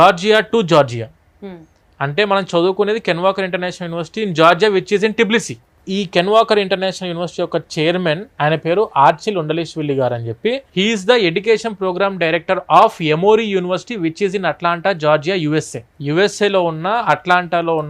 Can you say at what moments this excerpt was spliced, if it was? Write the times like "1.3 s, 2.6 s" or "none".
none